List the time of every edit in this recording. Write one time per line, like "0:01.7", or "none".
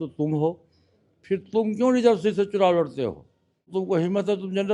0:03.6